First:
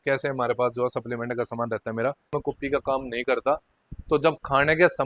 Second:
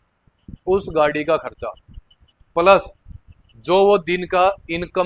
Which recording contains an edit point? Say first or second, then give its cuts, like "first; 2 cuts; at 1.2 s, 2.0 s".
first; 1 cut; at 2.3 s